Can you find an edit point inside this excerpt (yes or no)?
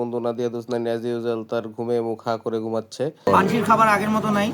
yes